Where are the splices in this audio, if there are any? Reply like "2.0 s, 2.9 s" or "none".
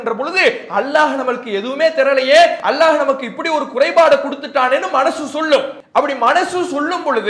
2.6 s, 5.8 s